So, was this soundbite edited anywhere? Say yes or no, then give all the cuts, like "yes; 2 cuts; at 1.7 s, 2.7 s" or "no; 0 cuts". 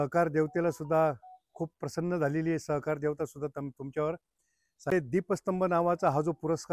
yes; 1 cut; at 4.9 s